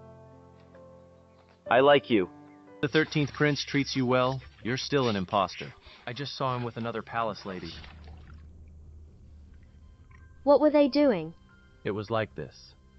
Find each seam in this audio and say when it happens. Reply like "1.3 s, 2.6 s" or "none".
2.8 s